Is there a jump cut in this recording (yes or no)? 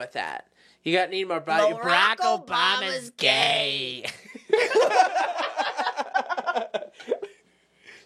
no